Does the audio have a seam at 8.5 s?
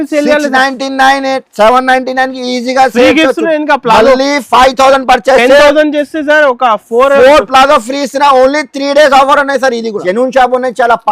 no; 1 cut; at 10.0 s

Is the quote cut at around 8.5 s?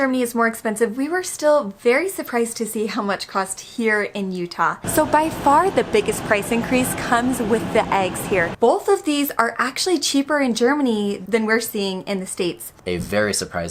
yes; 3 cuts; at 4.8 s, 8.5 s, 12.8 s

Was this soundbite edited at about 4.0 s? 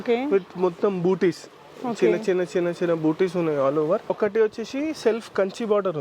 yes; 1 cut; at 4.0 s

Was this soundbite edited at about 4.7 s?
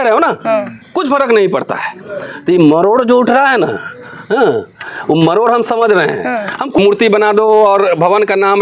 no; 1 cut; at 6.8 s

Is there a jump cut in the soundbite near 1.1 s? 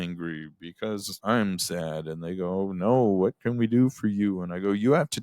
yes; 1 cut; at 1.1 s

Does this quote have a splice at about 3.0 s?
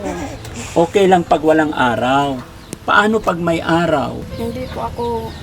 no; 1 cut; at 4.3 s

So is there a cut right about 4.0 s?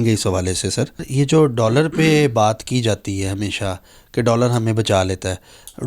no; 1 cut; at 1.1 s

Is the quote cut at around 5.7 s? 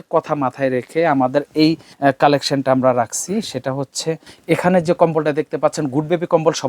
no; 2 cuts; at 1.9 s, 4.3 s

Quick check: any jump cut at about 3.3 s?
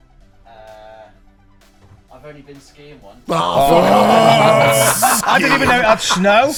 no; 0 cuts

